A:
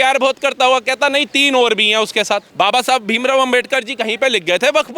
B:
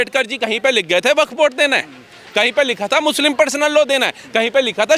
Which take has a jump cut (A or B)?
A